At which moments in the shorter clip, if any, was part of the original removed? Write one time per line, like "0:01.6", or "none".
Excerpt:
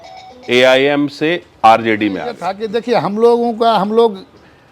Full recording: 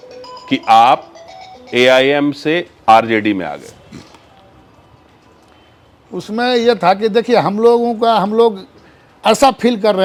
0:02.5